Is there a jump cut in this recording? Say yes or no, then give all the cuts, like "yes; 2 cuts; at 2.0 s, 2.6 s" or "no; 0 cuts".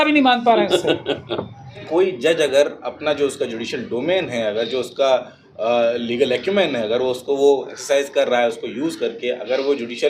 yes; 1 cut; at 1.9 s